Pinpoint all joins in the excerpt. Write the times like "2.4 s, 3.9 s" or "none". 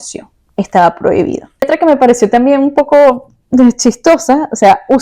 1.7 s